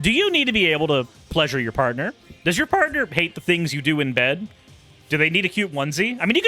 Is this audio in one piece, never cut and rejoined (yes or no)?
yes